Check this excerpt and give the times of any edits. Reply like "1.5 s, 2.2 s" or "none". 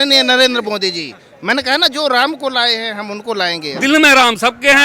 3.7 s